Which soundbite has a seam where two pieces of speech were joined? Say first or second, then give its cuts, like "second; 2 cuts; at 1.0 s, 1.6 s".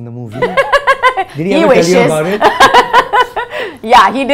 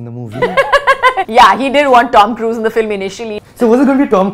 second; 2 cuts; at 1.2 s, 3.3 s